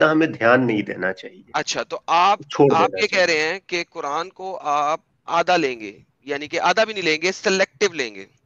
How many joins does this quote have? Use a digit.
0